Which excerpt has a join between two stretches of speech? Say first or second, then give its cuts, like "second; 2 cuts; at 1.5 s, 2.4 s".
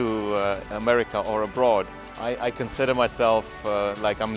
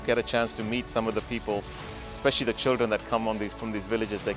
first; 1 cut; at 1.9 s